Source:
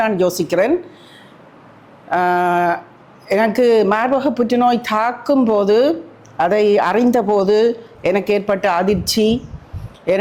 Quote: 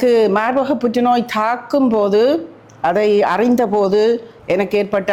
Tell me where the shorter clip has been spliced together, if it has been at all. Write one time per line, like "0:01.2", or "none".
none